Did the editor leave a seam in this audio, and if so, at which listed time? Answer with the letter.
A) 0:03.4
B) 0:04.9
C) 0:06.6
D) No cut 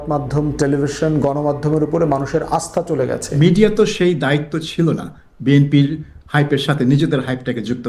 A